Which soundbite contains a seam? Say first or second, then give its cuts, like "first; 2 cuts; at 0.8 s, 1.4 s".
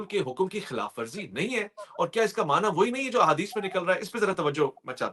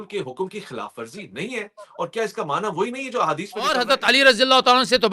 second; 1 cut; at 3.8 s